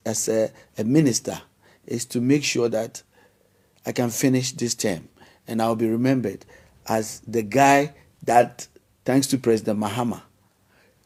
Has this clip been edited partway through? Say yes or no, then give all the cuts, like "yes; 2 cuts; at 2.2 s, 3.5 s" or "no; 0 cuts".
no; 0 cuts